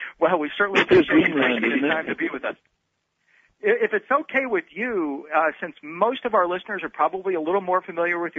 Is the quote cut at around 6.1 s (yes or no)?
yes